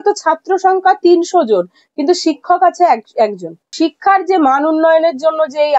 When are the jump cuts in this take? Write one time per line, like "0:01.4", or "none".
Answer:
0:03.7